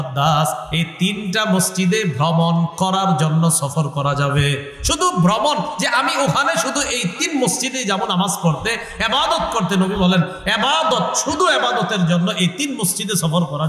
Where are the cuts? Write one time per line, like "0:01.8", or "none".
none